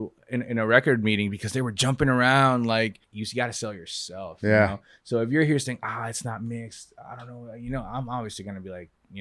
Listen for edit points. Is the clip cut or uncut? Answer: cut